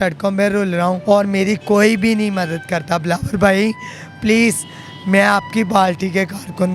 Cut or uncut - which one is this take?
cut